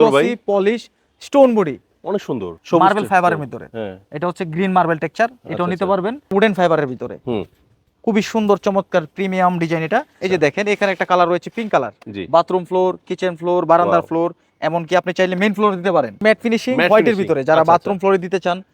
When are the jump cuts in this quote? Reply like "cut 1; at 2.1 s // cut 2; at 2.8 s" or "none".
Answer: cut 1; at 2.5 s // cut 2; at 6.3 s // cut 3; at 10.2 s // cut 4; at 16.2 s